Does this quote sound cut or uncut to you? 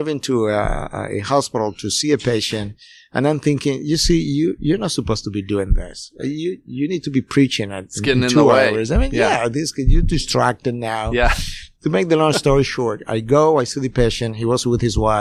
uncut